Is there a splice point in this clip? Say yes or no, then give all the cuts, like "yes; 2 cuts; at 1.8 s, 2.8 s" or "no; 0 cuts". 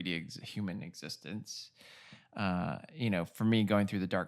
no; 0 cuts